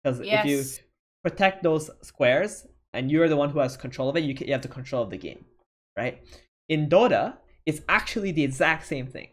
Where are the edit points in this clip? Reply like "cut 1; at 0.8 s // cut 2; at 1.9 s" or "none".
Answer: cut 1; at 2.9 s

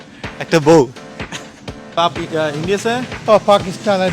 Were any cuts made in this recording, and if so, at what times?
cut 1; at 2.0 s

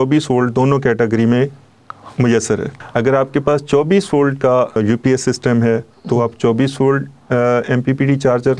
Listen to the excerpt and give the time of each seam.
cut 1; at 2.8 s // cut 2; at 4.8 s

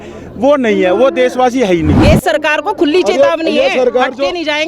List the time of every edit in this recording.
cut 1; at 2.0 s

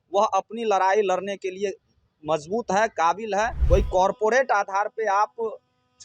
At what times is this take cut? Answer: cut 1; at 3.6 s

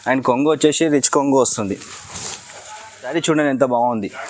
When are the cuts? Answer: cut 1; at 3.1 s

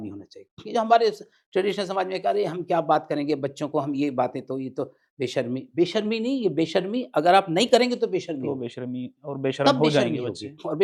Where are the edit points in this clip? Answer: none

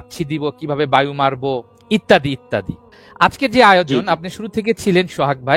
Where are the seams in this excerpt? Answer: cut 1; at 1.7 s

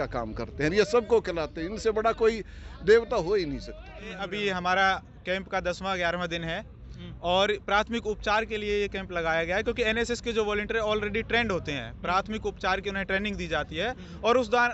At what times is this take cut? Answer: cut 1; at 4.3 s

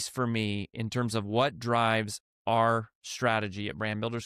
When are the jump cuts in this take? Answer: none

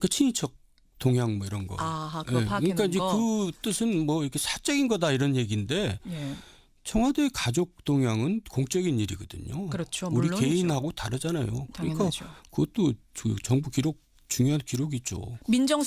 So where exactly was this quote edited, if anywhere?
cut 1; at 4.7 s

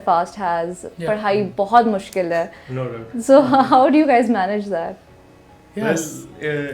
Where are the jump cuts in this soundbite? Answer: none

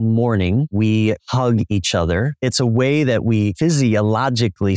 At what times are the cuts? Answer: cut 1; at 0.8 s // cut 2; at 2.3 s // cut 3; at 3.5 s

